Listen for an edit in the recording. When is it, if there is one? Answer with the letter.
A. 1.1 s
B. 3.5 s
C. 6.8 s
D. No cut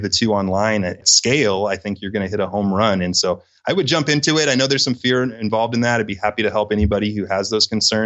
D